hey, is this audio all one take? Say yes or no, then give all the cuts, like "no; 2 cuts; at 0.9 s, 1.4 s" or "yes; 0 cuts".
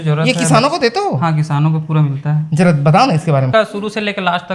no; 1 cut; at 3.5 s